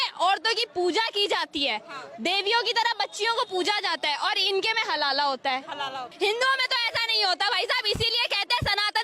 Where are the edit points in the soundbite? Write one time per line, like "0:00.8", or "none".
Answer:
0:06.1

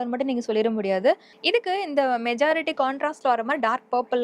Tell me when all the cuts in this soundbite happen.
0:01.3

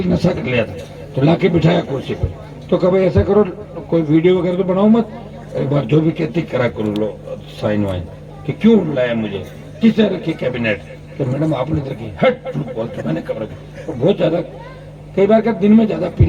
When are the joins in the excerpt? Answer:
none

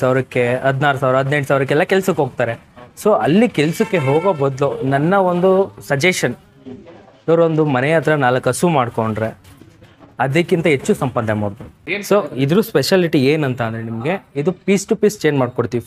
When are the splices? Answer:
0:11.9

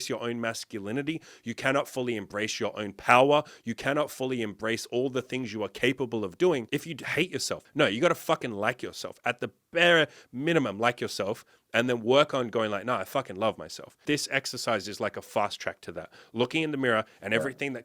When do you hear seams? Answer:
0:07.1
0:14.0

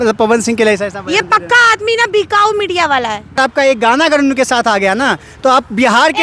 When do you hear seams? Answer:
0:03.4

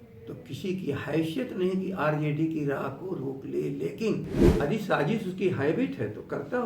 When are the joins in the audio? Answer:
0:04.4

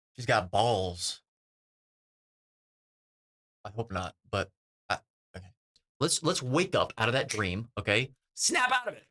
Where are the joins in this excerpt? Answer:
0:05.7

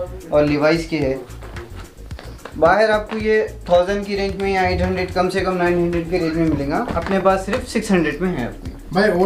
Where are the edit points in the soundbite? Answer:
none

